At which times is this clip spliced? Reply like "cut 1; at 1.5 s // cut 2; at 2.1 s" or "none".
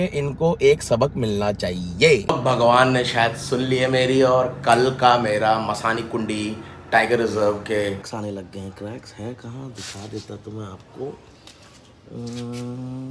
cut 1; at 2.2 s // cut 2; at 8.0 s